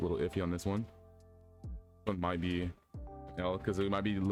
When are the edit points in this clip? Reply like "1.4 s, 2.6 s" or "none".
none